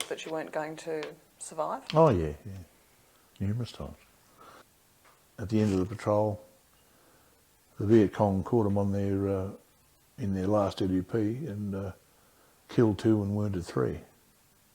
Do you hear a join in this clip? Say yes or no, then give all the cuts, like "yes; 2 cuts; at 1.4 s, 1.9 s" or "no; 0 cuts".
yes; 1 cut; at 4.6 s